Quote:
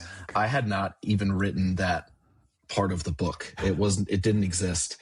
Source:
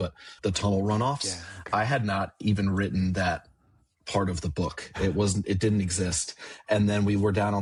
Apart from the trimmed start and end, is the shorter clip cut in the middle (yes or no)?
no